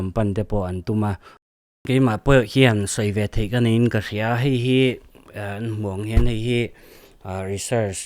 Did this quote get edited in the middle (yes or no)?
yes